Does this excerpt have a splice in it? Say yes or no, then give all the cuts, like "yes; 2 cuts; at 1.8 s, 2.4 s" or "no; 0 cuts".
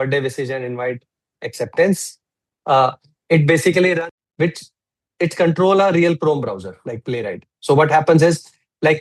yes; 1 cut; at 4.0 s